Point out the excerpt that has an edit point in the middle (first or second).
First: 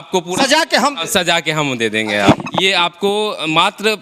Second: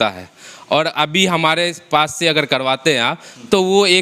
first